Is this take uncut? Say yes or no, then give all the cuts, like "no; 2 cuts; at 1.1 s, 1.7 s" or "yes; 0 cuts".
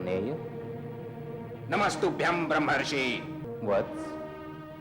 no; 1 cut; at 3.4 s